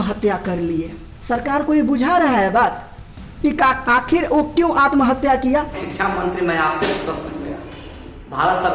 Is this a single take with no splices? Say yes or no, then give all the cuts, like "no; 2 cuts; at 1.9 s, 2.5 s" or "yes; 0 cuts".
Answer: no; 1 cut; at 5.8 s